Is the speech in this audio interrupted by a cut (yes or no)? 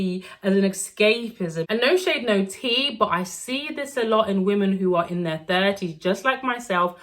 yes